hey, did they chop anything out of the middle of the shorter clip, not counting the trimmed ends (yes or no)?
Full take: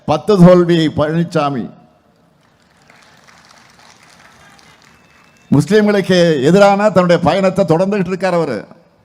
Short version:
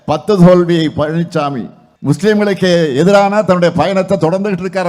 yes